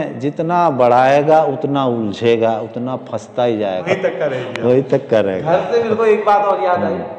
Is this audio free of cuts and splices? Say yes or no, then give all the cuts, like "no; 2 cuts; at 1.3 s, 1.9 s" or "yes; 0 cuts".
no; 1 cut; at 3.8 s